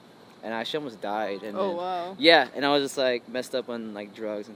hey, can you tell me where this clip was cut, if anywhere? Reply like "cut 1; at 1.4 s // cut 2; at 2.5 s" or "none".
none